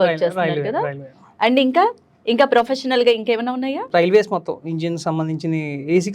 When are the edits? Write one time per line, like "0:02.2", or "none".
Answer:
0:03.8